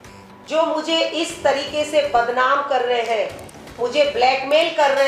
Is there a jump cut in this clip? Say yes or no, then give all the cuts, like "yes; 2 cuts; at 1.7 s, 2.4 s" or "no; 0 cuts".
no; 0 cuts